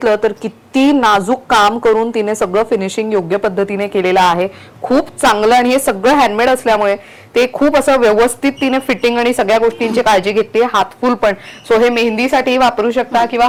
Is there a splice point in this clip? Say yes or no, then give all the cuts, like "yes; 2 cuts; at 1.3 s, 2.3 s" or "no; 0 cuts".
no; 0 cuts